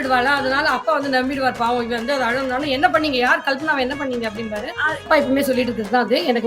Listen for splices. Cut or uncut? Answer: cut